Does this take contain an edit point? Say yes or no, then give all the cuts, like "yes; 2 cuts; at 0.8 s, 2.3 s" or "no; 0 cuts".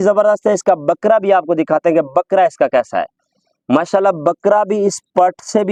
no; 0 cuts